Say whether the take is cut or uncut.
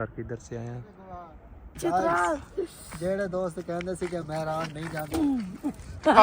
cut